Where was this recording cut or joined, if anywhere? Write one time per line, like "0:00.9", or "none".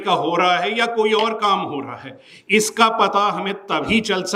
none